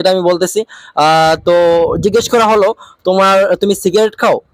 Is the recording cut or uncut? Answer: uncut